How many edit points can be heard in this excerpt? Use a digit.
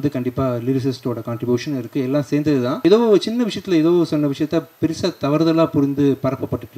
1